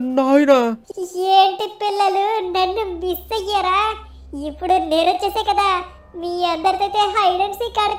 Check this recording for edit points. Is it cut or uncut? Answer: uncut